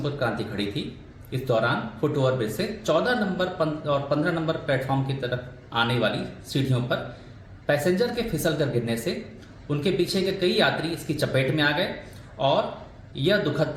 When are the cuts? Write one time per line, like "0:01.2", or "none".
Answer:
none